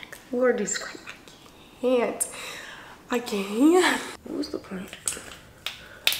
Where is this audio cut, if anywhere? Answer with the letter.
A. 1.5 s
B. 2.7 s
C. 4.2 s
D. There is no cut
C